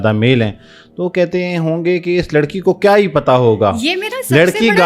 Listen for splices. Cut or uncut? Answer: uncut